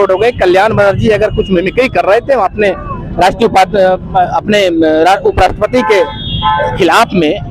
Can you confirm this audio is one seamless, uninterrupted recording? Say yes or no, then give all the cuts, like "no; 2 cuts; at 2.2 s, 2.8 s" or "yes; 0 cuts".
yes; 0 cuts